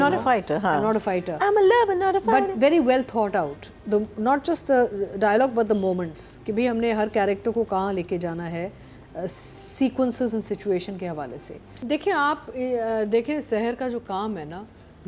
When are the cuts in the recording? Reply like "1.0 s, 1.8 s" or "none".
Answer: 11.7 s